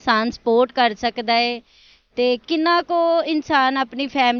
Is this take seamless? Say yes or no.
yes